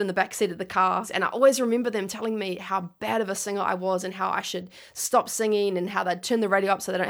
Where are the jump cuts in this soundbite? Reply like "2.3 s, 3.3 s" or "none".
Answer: 1.1 s